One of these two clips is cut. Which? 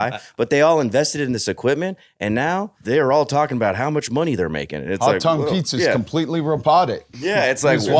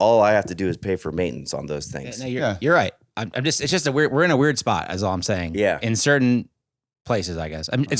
first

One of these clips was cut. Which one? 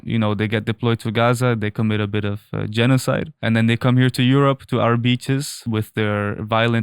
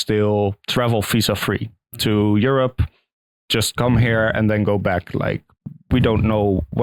first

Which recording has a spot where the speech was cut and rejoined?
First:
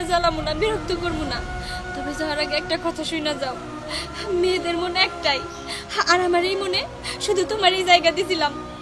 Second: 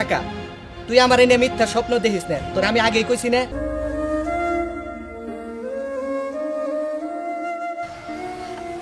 second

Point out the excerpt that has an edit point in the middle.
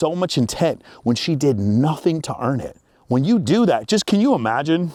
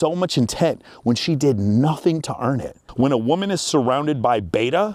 second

